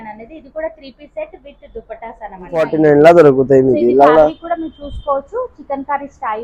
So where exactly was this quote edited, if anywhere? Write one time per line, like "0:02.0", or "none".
0:02.7